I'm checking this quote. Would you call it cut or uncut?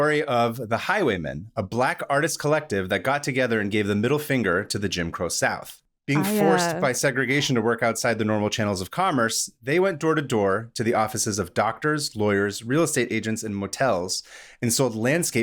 uncut